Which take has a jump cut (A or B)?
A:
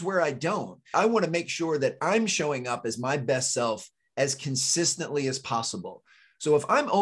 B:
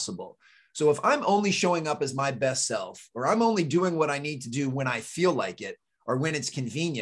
A